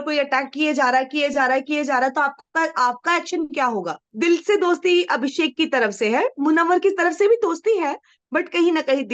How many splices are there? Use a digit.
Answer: 1